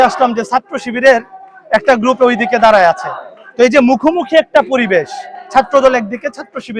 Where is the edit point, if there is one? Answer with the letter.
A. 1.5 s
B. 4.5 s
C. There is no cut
C